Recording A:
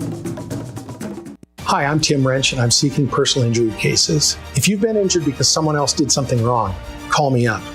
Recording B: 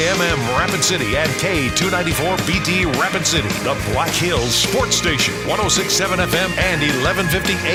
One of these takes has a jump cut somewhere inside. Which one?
A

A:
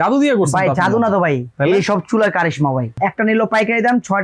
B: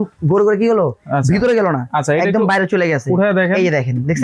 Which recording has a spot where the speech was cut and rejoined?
A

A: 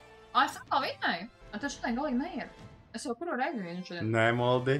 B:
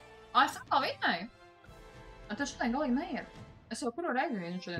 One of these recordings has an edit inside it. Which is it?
A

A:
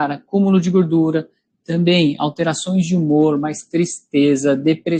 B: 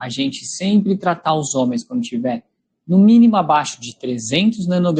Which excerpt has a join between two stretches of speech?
A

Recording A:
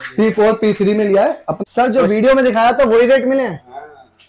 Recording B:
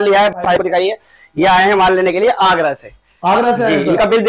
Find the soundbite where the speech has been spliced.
A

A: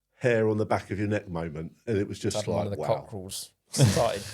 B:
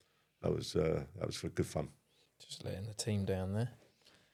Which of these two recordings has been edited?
A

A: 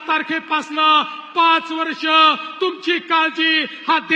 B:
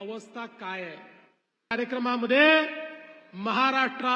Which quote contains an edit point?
B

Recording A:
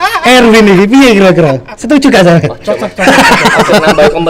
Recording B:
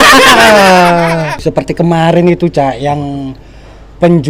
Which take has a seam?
B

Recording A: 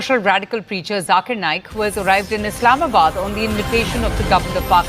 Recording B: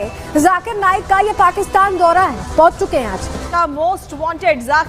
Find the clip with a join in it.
B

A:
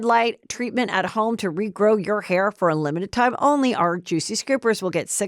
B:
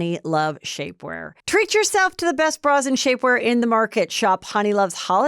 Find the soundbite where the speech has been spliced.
B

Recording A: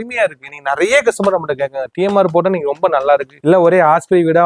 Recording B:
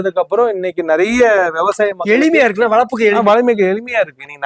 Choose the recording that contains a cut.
A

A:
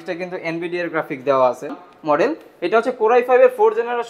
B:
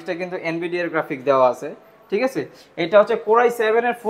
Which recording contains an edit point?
A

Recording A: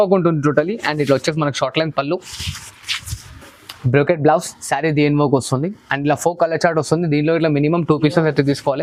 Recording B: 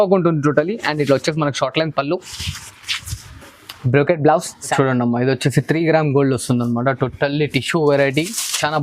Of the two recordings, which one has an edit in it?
B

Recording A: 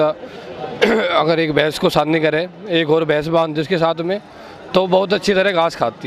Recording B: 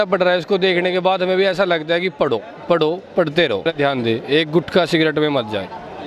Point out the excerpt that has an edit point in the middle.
B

